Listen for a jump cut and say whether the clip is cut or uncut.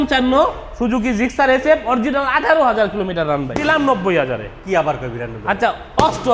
cut